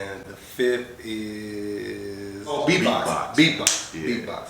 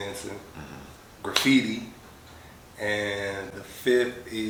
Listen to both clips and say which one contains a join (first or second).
first